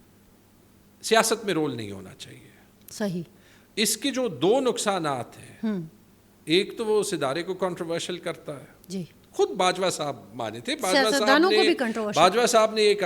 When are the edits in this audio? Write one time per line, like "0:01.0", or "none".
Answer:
none